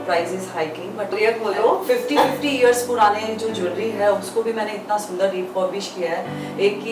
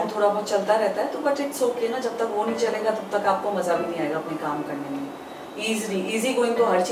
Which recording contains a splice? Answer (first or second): first